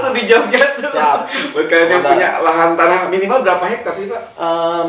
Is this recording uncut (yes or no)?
yes